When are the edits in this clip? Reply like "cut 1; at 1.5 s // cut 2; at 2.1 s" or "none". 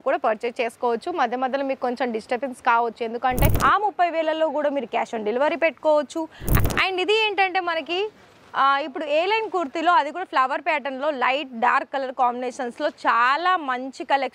cut 1; at 3.5 s // cut 2; at 6.4 s